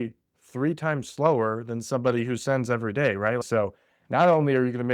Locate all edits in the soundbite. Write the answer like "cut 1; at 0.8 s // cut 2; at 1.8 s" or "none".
cut 1; at 3.4 s

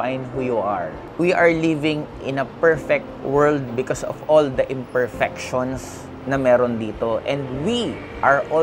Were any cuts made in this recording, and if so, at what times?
cut 1; at 1.0 s

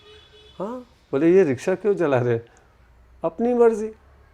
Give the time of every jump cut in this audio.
none

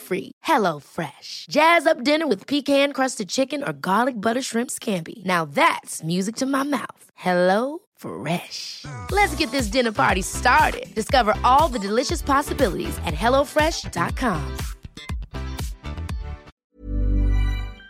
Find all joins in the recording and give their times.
cut 1; at 16.5 s

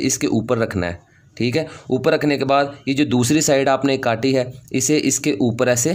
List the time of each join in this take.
none

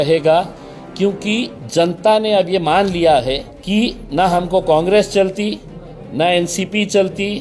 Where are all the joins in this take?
cut 1; at 3.5 s

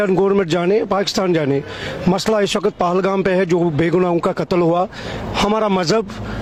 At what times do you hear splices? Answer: none

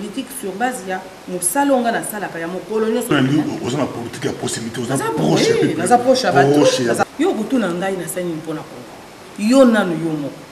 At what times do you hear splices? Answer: cut 1; at 3.1 s // cut 2; at 7.0 s

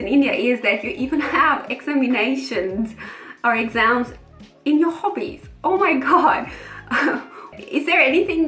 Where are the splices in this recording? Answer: cut 1; at 7.5 s

